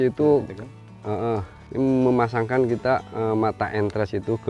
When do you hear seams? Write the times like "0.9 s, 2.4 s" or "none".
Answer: 1.6 s